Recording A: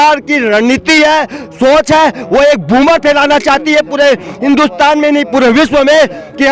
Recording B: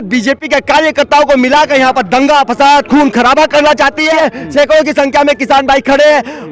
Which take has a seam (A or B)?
B